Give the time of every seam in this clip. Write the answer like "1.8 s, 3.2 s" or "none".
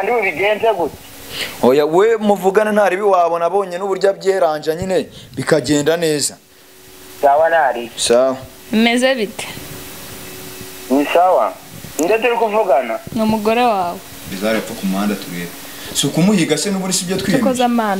14.2 s